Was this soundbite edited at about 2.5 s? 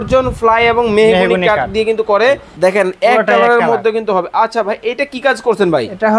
yes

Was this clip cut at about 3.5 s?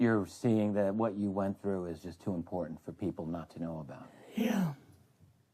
yes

